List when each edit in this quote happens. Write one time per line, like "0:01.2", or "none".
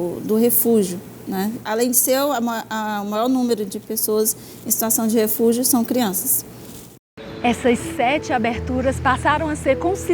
0:07.0